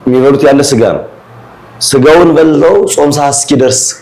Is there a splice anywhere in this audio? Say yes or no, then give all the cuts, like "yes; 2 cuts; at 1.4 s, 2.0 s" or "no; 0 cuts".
no; 0 cuts